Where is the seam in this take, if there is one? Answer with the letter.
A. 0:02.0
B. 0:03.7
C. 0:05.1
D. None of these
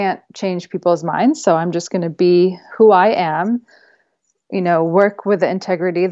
D